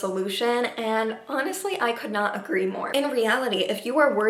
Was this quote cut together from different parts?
yes; 1 cut; at 2.8 s

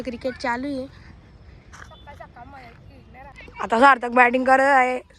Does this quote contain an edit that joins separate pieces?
yes; 1 cut; at 3.4 s

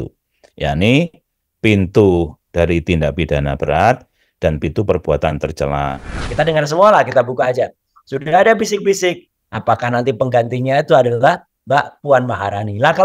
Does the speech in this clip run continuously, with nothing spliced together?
no; 1 cut; at 6.2 s

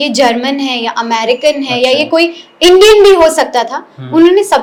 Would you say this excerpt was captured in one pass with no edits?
yes; 0 cuts

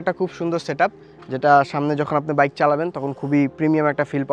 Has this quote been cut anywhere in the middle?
no; 0 cuts

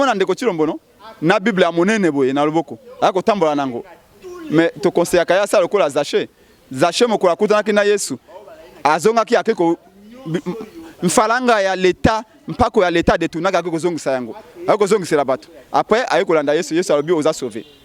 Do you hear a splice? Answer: no; 0 cuts

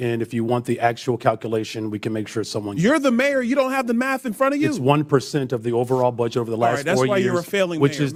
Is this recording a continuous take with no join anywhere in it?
yes; 0 cuts

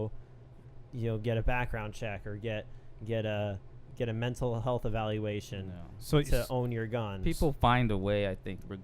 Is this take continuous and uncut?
yes; 0 cuts

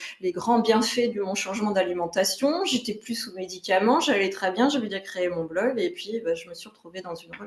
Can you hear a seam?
no; 0 cuts

